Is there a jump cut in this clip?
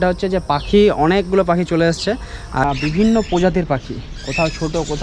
yes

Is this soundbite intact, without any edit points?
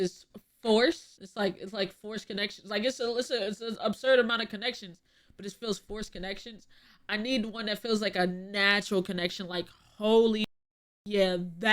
no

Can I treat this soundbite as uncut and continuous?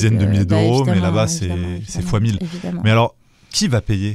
yes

